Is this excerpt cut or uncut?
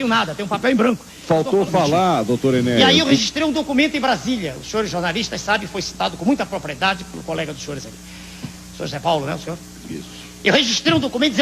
cut